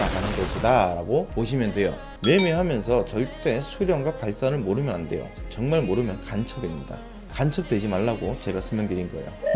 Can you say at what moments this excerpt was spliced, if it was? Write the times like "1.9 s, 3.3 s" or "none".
2.1 s